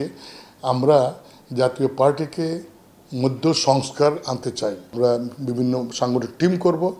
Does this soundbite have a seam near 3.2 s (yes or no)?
no